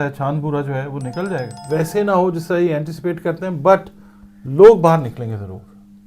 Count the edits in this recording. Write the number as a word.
one